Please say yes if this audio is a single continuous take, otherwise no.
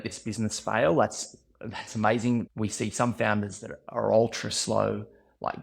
no